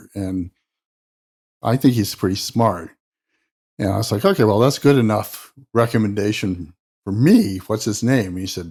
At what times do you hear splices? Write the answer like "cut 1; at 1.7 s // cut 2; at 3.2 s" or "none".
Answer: none